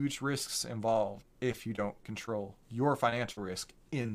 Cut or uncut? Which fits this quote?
cut